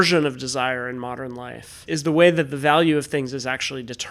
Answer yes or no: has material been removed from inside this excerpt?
yes